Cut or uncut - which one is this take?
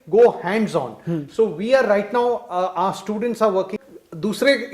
cut